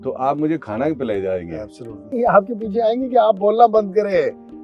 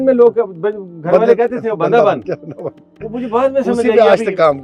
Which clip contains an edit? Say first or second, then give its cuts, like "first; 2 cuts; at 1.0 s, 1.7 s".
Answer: first; 1 cut; at 2.1 s